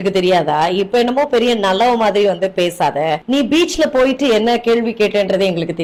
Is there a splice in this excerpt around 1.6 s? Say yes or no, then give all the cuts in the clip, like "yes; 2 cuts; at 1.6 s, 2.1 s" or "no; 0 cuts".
no; 0 cuts